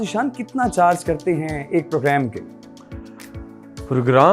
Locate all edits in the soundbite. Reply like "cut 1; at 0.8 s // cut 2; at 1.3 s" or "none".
none